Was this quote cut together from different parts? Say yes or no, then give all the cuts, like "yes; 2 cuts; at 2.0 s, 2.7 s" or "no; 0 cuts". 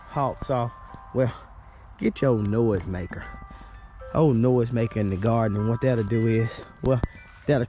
no; 0 cuts